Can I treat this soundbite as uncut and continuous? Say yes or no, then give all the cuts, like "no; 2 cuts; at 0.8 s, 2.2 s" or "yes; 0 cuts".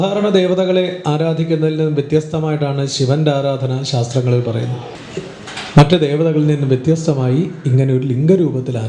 no; 1 cut; at 4.9 s